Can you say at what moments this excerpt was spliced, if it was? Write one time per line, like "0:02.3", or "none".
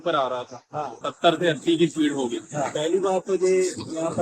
0:01.0